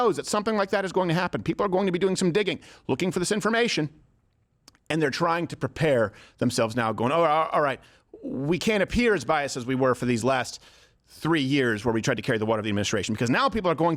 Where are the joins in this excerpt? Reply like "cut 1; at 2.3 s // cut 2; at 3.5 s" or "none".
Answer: none